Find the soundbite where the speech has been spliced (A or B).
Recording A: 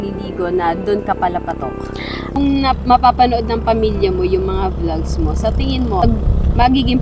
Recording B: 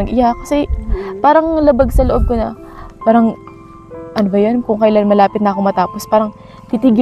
A